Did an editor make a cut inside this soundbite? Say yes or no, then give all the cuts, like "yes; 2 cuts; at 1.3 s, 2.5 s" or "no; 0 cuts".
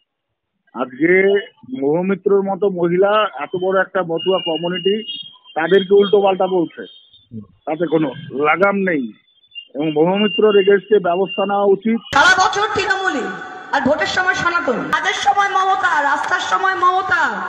yes; 2 cuts; at 12.1 s, 14.9 s